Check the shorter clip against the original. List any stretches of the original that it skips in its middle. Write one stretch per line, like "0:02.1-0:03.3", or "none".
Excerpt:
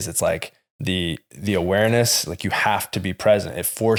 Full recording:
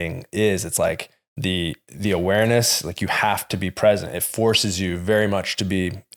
none

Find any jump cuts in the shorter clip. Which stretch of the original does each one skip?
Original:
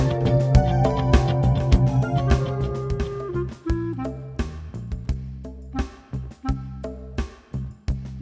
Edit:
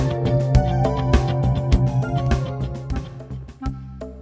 0:02.7-0:05.5

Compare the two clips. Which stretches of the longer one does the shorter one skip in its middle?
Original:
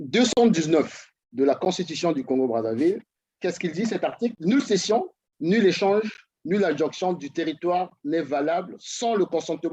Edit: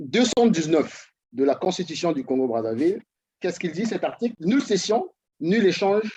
none

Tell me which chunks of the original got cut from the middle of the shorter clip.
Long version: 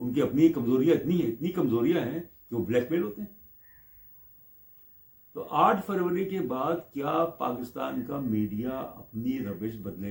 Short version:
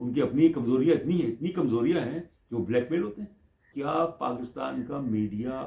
0:03.7-0:06.9

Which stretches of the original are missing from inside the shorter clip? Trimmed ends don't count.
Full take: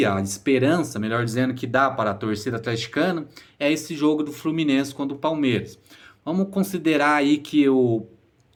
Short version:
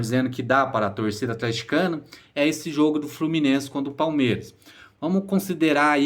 none

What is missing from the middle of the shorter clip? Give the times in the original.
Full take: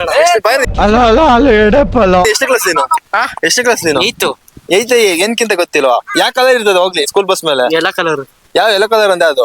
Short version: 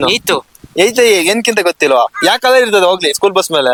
none

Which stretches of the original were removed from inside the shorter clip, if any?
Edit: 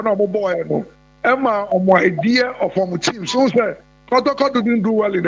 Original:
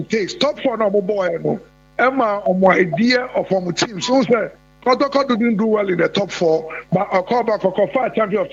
none

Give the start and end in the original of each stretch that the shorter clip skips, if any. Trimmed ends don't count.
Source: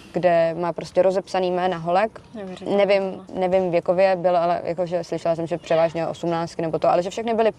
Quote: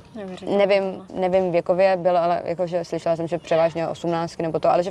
none

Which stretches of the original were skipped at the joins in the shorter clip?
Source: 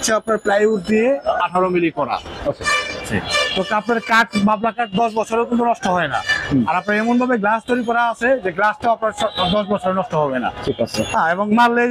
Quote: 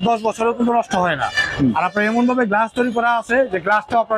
none

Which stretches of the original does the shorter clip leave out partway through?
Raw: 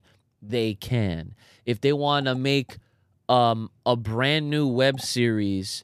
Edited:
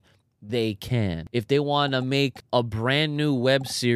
0:01.2-0:01.6
0:02.7-0:03.7

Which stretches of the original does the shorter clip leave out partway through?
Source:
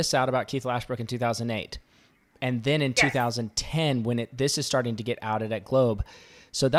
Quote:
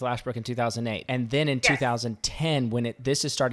0:01.6-0:02.3

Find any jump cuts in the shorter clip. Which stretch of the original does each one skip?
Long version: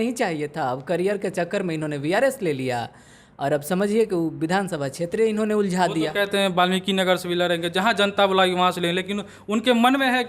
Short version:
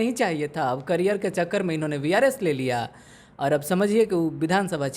none

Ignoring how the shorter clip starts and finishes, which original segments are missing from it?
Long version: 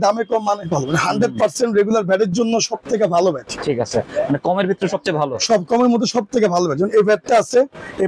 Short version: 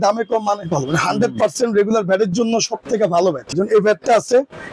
0:03.5-0:06.7

